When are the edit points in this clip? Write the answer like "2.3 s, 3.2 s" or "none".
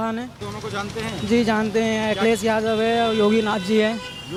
none